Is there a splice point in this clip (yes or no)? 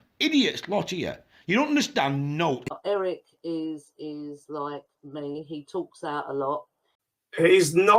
no